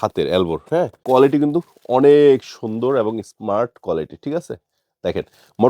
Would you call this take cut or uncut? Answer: cut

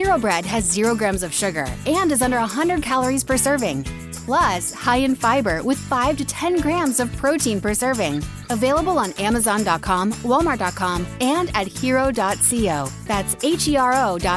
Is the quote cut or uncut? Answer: uncut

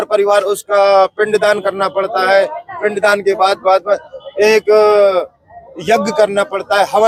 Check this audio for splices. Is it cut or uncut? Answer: uncut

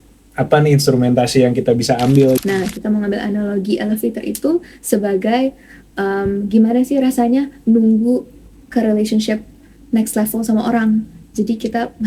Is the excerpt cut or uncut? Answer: cut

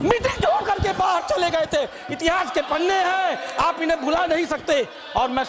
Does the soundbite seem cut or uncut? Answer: uncut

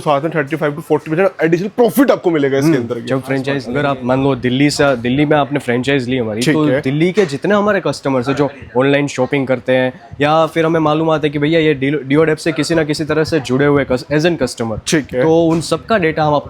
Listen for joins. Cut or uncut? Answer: cut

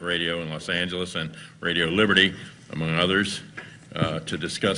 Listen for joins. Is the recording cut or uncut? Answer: uncut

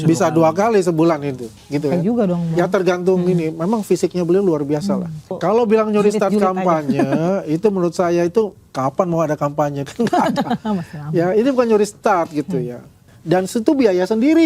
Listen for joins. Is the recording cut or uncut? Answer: cut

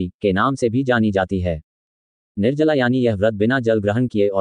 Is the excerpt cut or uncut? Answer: cut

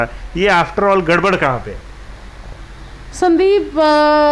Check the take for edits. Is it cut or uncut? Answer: uncut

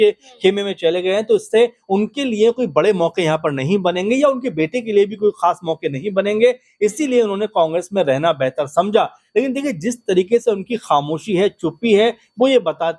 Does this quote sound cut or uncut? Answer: uncut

